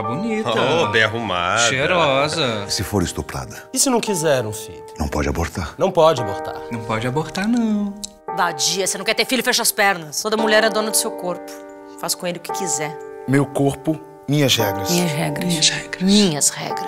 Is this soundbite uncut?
yes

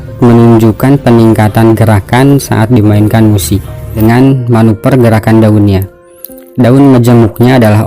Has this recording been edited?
yes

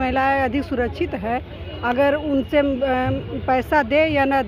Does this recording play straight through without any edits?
yes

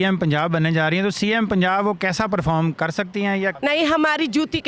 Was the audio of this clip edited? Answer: yes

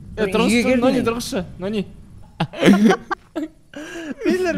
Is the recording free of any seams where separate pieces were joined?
no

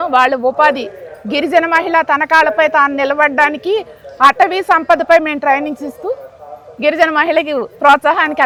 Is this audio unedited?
yes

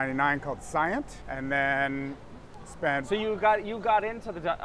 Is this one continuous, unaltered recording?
yes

